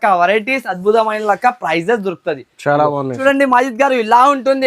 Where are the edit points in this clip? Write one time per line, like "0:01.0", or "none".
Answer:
0:03.2